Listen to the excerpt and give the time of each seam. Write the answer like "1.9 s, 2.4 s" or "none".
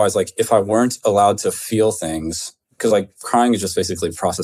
none